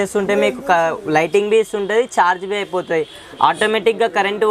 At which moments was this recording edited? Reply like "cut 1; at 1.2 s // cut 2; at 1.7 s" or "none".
none